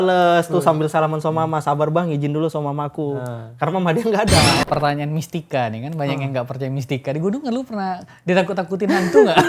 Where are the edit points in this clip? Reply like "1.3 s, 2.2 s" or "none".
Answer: 4.6 s